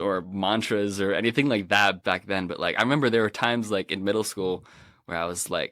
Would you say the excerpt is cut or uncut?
cut